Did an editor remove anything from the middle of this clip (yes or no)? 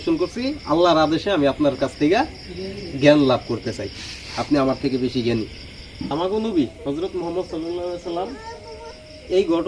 yes